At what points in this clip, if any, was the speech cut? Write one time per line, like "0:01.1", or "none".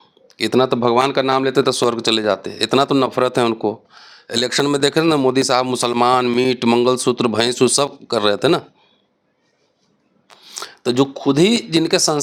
none